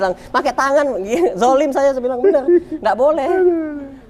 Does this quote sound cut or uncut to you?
uncut